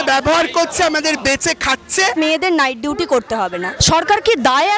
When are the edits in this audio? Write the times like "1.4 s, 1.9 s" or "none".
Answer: 2.2 s, 3.7 s